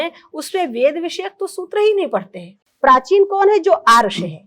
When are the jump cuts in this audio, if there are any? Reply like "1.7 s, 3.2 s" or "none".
2.6 s